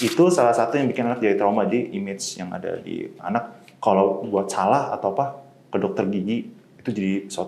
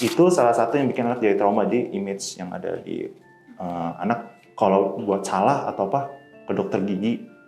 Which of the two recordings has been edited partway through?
first; 1 cut; at 3.2 s

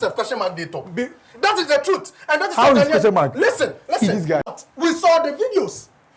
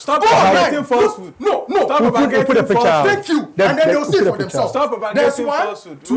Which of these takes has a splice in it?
first; 1 cut; at 4.5 s

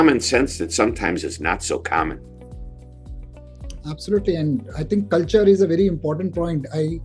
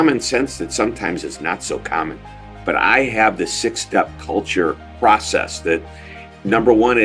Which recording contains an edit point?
second; 2 cuts; at 2.5 s, 4.9 s

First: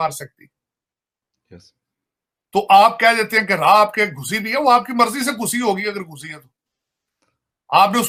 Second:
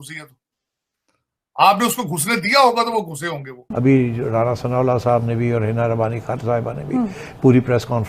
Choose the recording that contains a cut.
second; 1 cut; at 3.7 s

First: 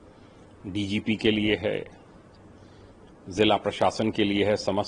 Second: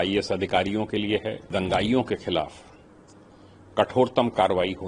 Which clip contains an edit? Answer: second; 1 cut; at 1.5 s

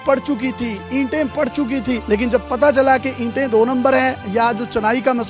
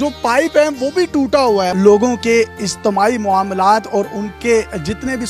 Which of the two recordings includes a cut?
second; 1 cut; at 1.7 s

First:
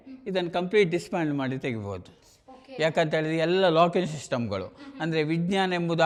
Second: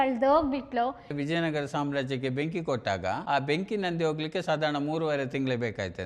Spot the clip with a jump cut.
second; 1 cut; at 1.1 s

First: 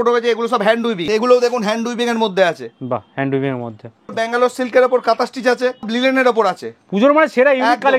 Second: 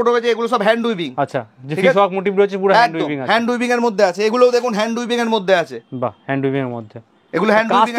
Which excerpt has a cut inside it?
first; 3 cuts; at 1.0 s, 4.2 s, 5.9 s

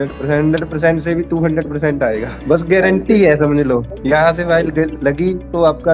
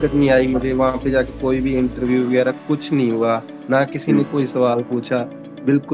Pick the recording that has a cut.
first; 2 cuts; at 2.3 s, 3.9 s

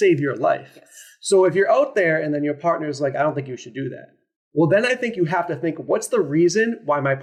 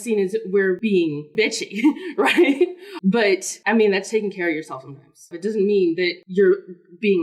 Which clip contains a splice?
second; 4 cuts; at 1.0 s, 3.1 s, 5.2 s, 6.2 s

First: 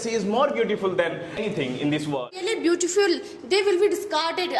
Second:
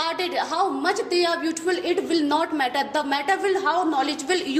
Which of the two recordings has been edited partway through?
first; 2 cuts; at 1.4 s, 2.4 s

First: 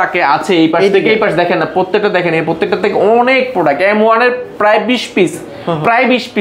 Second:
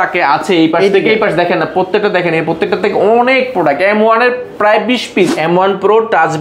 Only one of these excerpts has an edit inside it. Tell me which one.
second; 1 cut; at 5.3 s

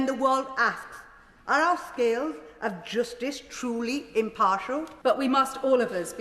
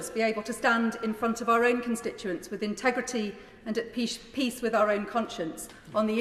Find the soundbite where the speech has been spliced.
first; 1 cut; at 4.9 s

